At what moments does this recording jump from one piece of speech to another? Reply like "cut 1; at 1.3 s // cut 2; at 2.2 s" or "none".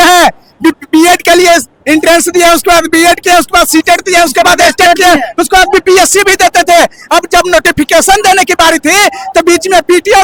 none